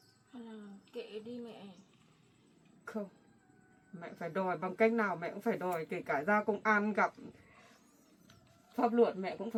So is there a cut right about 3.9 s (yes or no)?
no